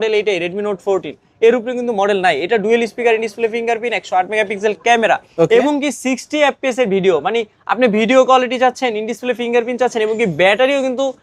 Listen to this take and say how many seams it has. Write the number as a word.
zero